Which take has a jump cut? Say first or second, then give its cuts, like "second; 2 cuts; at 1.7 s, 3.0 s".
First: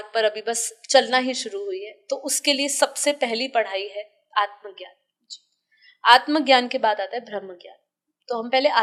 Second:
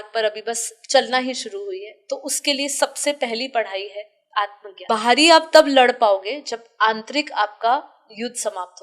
second; 1 cut; at 4.7 s